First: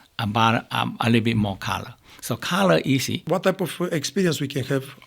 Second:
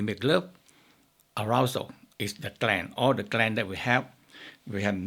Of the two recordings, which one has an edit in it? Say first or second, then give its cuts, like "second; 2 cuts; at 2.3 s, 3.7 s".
first; 1 cut; at 3.2 s